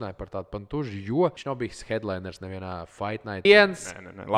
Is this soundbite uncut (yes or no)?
no